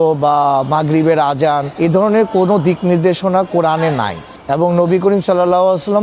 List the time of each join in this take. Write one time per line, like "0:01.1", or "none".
0:01.7